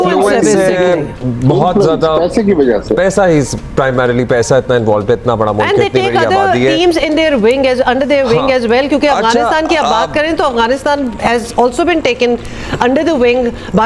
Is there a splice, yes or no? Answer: no